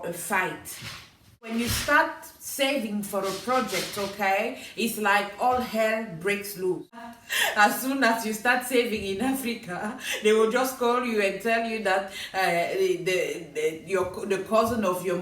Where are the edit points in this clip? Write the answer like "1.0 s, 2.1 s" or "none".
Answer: 1.5 s, 7.1 s